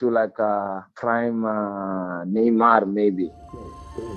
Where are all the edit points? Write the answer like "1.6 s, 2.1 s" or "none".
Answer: 1.0 s, 3.4 s